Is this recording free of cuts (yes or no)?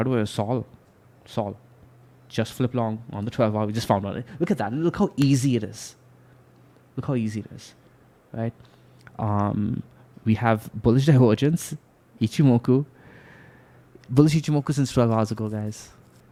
yes